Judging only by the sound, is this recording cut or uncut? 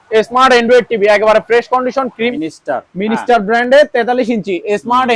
cut